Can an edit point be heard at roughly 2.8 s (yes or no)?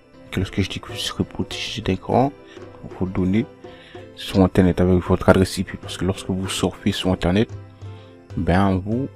yes